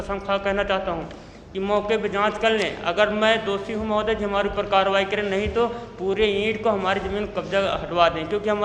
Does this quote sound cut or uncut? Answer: uncut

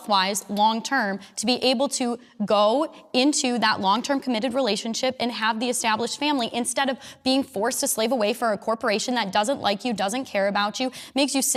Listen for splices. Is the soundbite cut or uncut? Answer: uncut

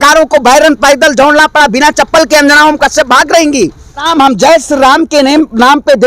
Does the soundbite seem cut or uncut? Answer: cut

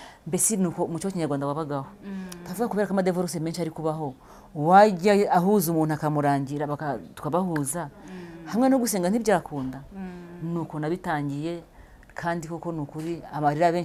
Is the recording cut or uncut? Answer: uncut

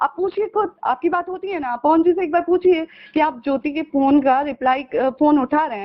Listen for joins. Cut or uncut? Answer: uncut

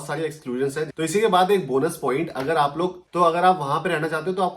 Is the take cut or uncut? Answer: cut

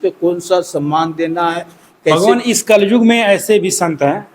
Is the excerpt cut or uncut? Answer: cut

